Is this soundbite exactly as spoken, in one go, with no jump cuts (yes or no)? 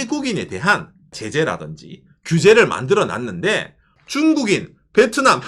no